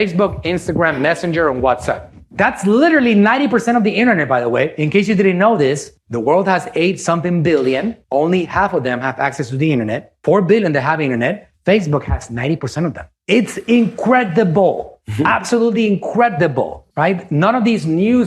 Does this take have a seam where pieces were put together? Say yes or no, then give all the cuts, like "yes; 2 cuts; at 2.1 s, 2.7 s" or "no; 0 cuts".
yes; 1 cut; at 10.1 s